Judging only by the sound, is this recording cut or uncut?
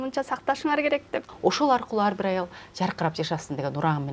cut